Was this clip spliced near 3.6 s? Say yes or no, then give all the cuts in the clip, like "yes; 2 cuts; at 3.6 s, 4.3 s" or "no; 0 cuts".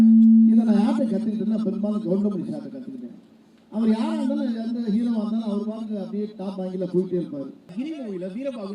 no; 1 cut; at 7.7 s